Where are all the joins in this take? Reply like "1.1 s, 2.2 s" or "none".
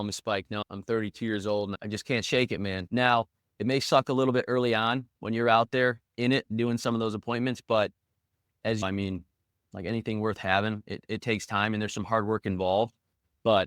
2.8 s